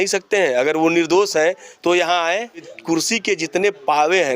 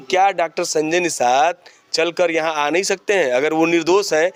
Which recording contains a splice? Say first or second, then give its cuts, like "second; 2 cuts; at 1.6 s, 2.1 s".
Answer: first; 1 cut; at 2.7 s